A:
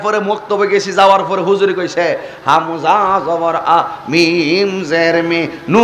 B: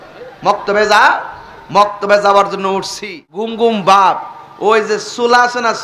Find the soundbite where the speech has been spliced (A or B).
B